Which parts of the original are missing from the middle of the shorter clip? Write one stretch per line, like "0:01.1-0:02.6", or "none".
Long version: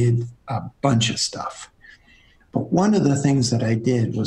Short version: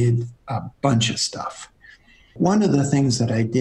0:02.3-0:02.7